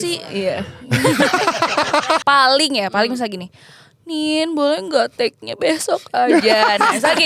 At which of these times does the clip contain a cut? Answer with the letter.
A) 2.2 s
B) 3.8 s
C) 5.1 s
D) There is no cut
A